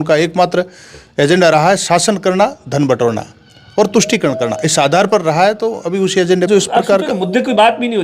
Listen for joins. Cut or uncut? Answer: cut